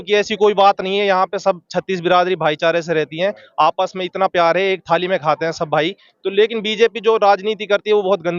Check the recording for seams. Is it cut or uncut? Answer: uncut